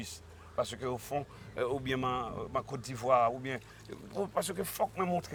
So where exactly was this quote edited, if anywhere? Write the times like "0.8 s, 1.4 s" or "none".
none